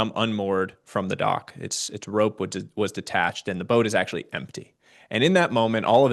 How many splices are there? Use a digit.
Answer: 0